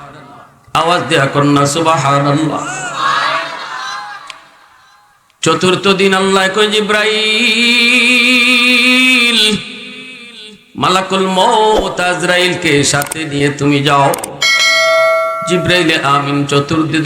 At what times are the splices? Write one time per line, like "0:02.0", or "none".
0:14.7
0:15.4

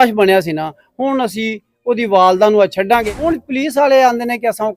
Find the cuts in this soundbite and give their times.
0:03.0

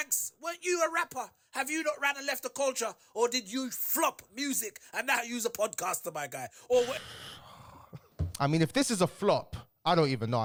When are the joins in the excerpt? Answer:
none

